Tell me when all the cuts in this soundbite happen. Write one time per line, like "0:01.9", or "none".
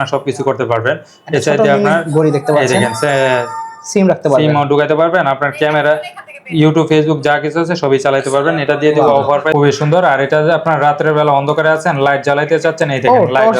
0:09.5